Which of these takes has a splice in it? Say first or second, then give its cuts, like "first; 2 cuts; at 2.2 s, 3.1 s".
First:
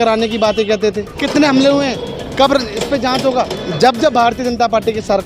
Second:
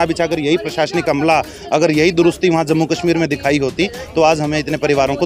first; 2 cuts; at 1.2 s, 3.6 s